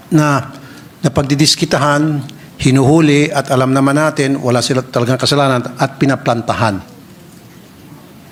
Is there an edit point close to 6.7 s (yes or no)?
no